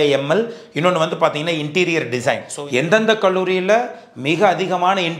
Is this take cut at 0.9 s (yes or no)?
no